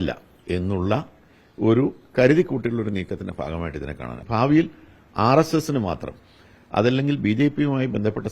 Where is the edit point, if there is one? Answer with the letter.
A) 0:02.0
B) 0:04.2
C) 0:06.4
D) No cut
B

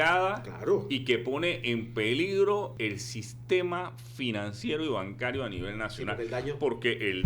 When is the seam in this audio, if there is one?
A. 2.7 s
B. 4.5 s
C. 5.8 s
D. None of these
A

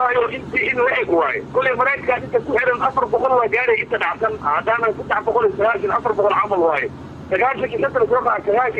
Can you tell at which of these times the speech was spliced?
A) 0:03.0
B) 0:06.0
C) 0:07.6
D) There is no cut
B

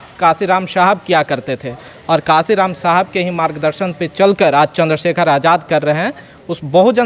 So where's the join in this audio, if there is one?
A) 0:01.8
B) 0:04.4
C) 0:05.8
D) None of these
D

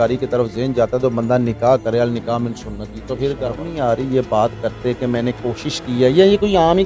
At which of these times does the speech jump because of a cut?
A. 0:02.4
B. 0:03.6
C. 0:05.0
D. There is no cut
B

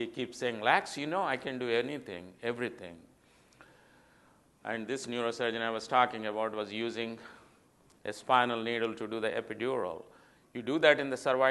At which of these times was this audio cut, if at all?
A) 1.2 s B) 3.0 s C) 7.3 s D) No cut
B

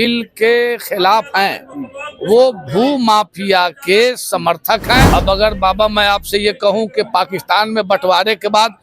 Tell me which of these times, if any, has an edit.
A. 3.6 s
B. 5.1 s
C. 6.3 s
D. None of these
B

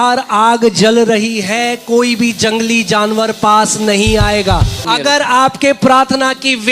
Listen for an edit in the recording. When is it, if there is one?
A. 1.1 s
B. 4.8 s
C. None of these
B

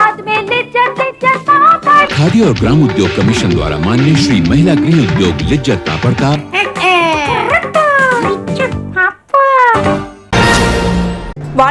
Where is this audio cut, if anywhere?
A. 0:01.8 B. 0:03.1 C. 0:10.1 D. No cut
C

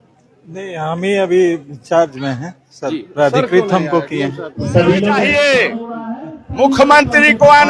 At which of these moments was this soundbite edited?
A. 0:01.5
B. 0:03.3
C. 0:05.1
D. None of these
C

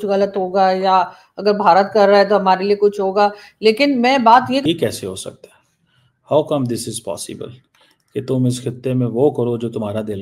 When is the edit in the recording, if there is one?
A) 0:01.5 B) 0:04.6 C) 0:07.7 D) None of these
B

